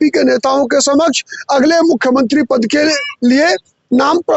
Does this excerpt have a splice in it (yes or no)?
no